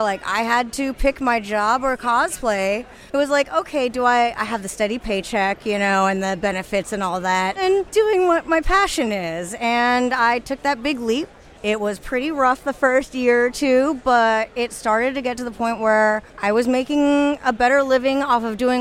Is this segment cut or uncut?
cut